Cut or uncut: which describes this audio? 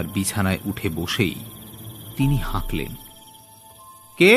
uncut